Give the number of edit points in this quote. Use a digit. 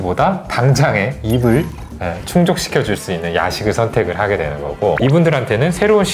1